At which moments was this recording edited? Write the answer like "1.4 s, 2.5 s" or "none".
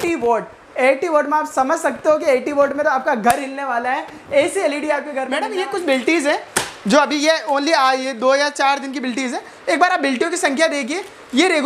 5.2 s